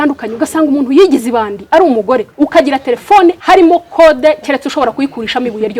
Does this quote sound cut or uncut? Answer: cut